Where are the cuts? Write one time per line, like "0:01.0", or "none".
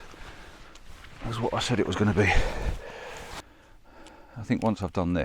0:03.4